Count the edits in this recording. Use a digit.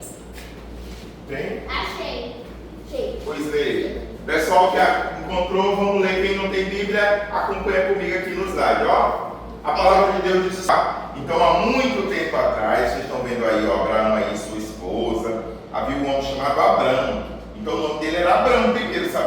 1